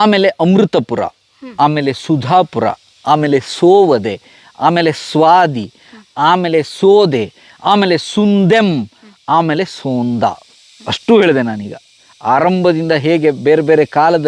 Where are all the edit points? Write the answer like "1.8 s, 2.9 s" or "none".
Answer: none